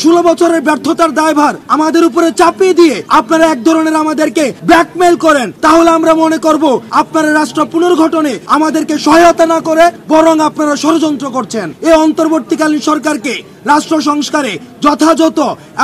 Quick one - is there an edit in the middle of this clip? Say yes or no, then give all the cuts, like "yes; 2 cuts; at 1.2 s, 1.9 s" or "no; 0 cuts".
yes; 8 cuts; at 1.6 s, 3.0 s, 4.6 s, 5.5 s, 6.9 s, 8.4 s, 10.0 s, 11.7 s